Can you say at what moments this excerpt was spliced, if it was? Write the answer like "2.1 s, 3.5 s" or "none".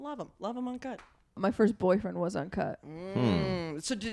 1.4 s

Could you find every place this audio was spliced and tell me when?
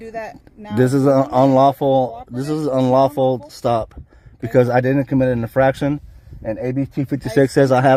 none

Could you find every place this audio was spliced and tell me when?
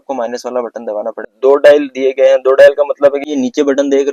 1.3 s, 3.2 s

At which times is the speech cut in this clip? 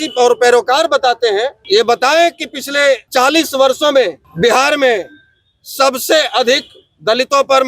1.6 s, 3.0 s, 4.2 s

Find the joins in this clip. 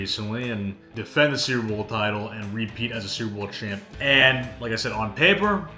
0.9 s, 3.9 s

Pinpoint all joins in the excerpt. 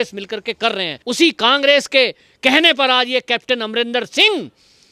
1.0 s

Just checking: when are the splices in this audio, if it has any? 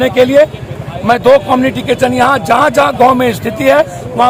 none

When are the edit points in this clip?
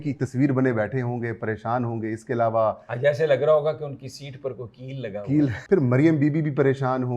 5.6 s

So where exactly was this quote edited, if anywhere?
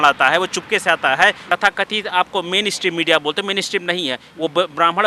1.4 s

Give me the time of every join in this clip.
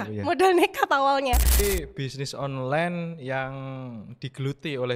1.5 s

